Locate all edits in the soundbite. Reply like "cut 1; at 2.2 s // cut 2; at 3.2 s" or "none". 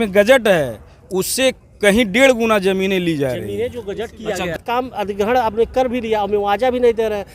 cut 1; at 4.6 s